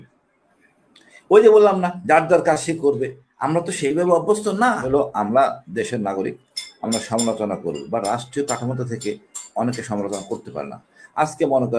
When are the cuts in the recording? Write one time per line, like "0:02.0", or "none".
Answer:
0:04.8